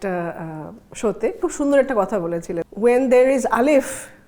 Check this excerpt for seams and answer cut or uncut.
cut